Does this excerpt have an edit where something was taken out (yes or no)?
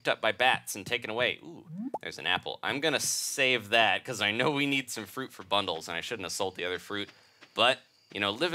no